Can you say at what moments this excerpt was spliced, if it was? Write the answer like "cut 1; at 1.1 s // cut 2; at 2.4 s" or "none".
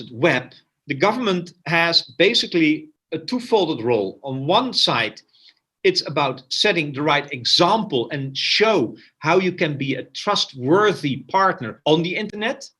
none

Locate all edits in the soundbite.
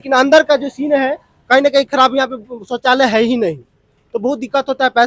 none

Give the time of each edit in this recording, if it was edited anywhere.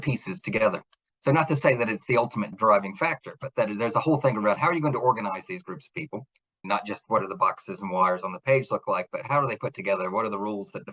cut 1; at 6.6 s

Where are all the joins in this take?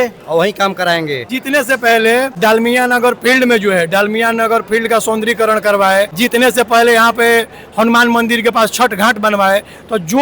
cut 1; at 1.2 s // cut 2; at 2.3 s // cut 3; at 6.1 s

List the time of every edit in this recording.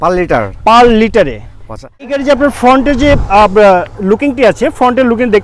cut 1; at 2.2 s

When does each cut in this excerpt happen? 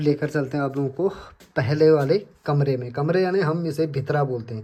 none

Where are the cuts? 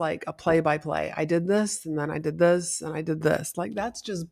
none

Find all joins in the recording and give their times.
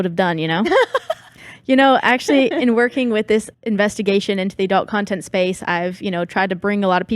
cut 1; at 3.5 s

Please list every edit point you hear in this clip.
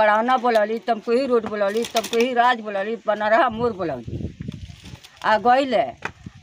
none

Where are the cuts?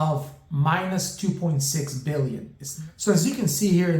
cut 1; at 2.6 s

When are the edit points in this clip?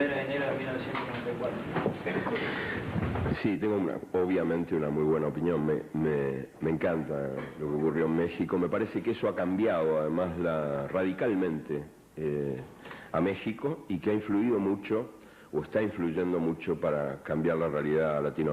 cut 1; at 12.0 s

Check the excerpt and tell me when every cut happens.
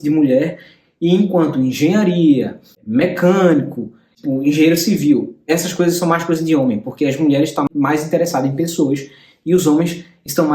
cut 1; at 4.1 s // cut 2; at 7.7 s

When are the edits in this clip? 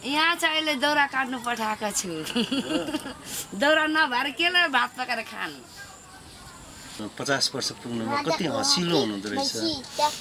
cut 1; at 7.0 s

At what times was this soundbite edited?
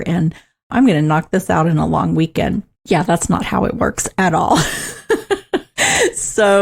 cut 1; at 2.7 s

